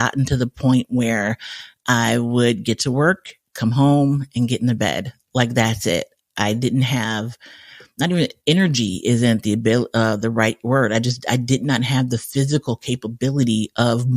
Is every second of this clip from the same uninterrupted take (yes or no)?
yes